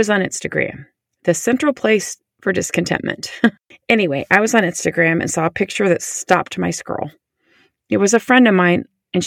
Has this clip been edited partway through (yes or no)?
yes